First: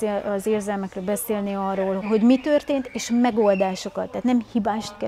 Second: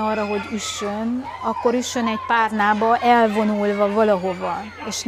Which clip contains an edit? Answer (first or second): first